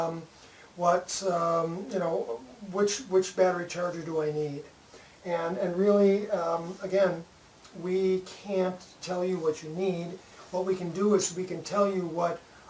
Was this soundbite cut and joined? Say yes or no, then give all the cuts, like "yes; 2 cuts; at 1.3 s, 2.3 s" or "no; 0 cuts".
no; 0 cuts